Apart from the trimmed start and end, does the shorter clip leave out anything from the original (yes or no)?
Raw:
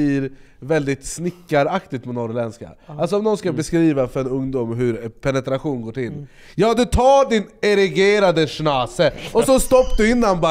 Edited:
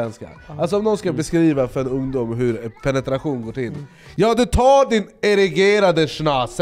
no